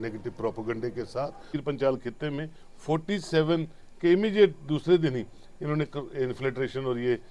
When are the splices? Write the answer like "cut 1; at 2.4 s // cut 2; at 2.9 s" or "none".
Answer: cut 1; at 1.6 s